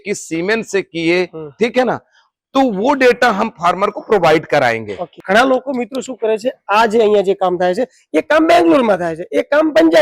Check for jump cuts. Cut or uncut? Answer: cut